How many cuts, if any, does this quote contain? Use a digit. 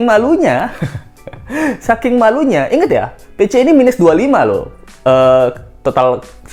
0